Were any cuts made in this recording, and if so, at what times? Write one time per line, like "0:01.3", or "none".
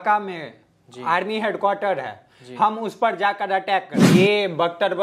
0:04.0

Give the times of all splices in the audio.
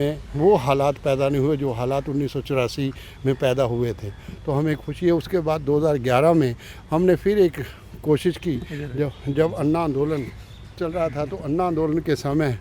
none

